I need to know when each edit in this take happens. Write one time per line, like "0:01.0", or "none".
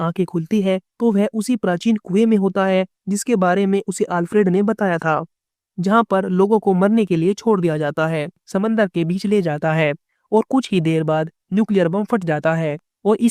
0:05.5
0:08.4